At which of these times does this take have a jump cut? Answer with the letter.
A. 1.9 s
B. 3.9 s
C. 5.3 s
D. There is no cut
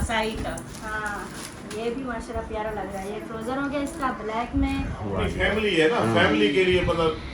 C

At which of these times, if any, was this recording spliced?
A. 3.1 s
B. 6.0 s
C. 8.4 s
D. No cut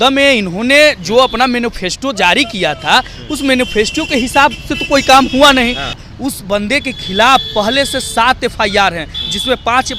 B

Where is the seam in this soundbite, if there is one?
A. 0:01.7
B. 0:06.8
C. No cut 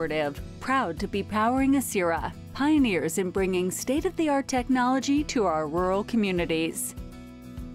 B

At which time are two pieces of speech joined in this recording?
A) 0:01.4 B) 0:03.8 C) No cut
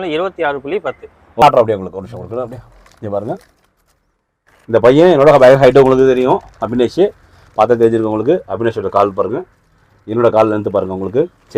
A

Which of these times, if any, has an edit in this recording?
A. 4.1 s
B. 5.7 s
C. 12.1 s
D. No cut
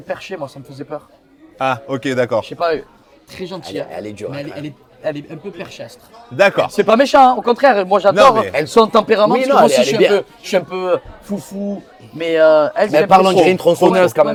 D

